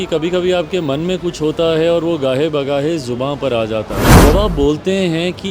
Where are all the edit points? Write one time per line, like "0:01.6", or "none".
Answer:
0:04.1